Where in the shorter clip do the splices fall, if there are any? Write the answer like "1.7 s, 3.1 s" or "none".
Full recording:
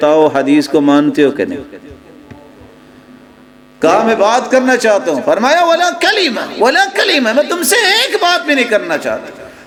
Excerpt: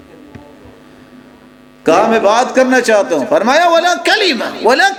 none